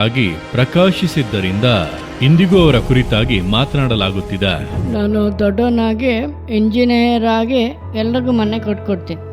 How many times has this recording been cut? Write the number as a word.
one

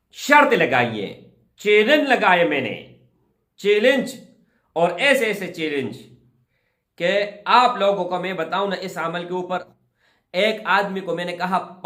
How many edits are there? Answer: one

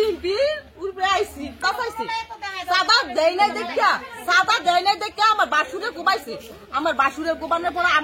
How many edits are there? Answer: one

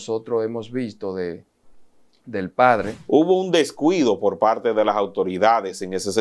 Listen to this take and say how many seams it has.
one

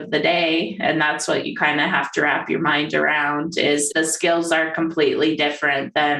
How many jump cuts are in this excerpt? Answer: one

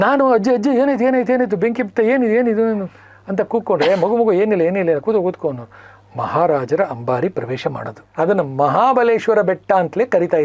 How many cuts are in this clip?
one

